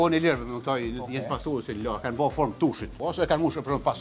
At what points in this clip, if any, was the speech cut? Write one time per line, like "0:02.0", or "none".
0:02.9